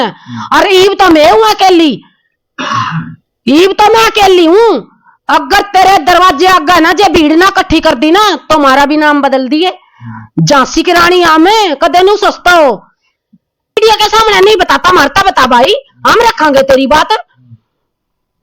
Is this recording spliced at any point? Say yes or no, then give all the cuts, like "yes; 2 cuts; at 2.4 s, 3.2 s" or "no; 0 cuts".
yes; 1 cut; at 13.8 s